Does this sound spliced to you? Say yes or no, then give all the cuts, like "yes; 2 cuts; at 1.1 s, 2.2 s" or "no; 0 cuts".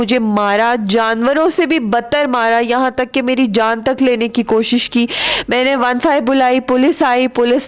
no; 0 cuts